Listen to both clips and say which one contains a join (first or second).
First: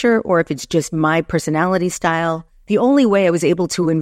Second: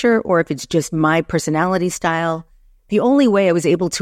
first